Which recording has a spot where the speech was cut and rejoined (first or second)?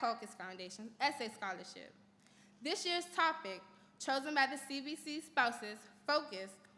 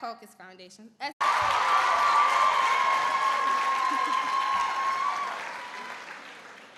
first